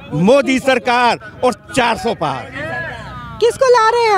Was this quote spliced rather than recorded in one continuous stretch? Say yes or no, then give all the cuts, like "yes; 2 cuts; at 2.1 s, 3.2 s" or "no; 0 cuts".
no; 0 cuts